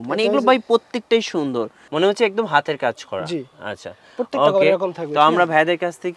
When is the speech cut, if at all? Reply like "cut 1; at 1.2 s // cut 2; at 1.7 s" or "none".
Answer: cut 1; at 1.8 s